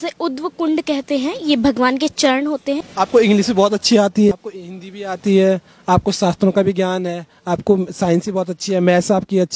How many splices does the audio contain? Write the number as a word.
two